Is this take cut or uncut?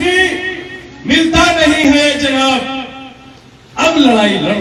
uncut